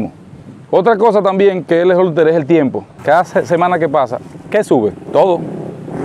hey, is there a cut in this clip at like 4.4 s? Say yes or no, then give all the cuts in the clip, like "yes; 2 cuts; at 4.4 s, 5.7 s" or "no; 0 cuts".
no; 1 cut; at 2.9 s